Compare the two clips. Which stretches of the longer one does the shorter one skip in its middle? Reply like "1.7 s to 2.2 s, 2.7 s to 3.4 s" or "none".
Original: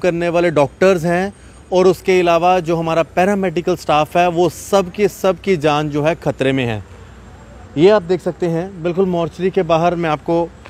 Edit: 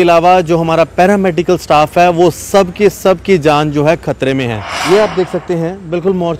6.9 s to 7.6 s